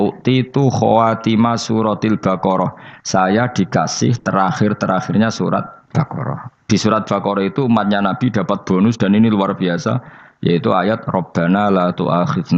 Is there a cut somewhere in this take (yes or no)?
yes